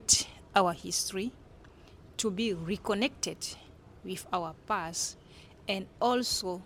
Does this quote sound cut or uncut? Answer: uncut